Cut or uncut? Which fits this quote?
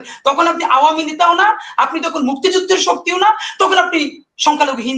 uncut